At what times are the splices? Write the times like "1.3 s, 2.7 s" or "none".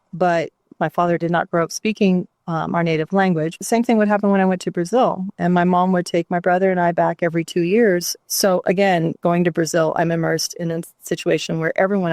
0.8 s, 3.6 s, 8.1 s